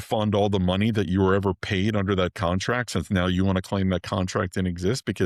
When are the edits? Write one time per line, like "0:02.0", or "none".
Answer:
none